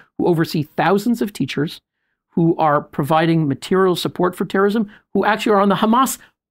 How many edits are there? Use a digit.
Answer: 0